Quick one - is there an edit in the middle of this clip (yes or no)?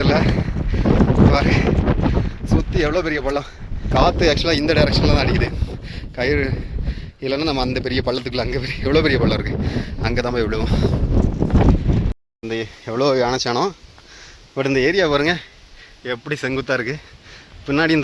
yes